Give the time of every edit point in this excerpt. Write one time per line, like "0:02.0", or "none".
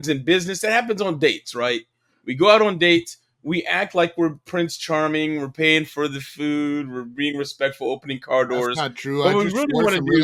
none